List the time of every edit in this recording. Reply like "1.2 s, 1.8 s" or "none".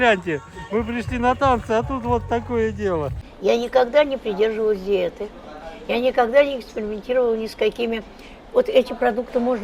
3.2 s